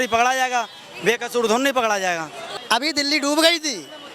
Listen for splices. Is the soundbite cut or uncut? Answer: cut